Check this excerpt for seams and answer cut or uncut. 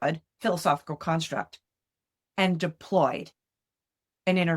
uncut